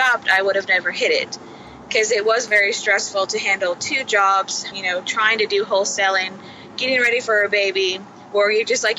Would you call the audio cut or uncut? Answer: cut